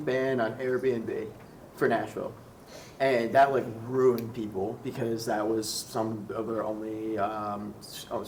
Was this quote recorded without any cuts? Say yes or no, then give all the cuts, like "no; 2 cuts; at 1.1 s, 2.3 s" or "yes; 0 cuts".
yes; 0 cuts